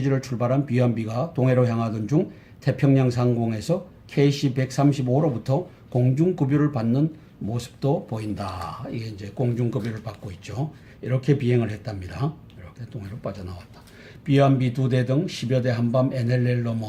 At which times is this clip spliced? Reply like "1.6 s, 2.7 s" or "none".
none